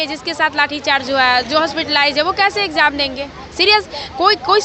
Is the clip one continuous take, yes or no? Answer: yes